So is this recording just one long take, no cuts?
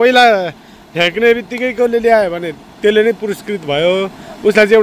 yes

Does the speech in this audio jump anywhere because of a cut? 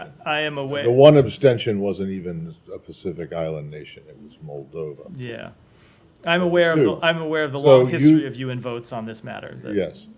no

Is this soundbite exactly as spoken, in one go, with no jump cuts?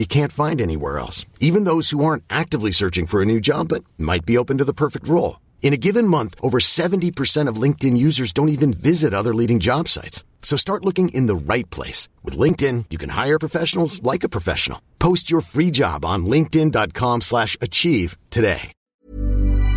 no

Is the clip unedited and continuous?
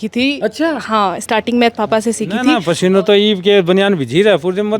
no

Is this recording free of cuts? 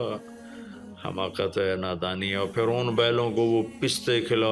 yes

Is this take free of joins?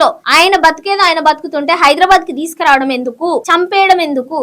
no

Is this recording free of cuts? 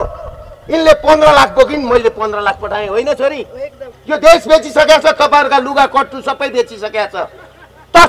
no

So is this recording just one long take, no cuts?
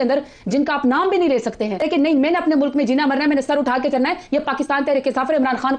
no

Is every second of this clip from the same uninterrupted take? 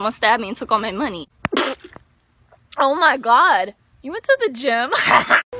no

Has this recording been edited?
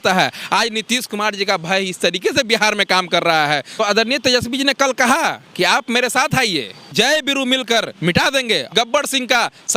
yes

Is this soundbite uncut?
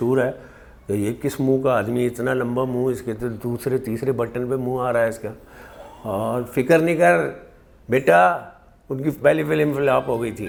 yes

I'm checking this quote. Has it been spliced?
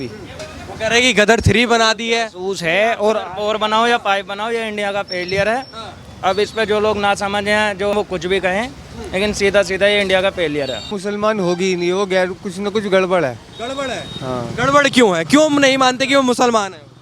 yes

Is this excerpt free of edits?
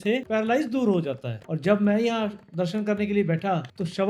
no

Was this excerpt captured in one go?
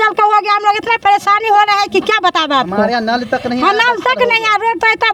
yes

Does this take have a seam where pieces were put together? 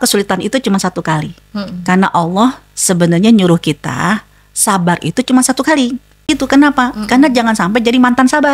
yes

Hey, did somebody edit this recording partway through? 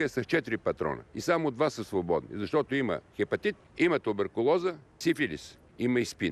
yes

